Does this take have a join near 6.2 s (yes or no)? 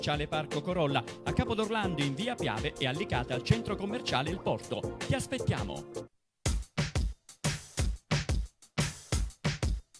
yes